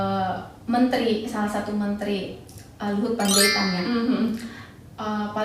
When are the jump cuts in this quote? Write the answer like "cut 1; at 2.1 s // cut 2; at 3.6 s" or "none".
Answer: none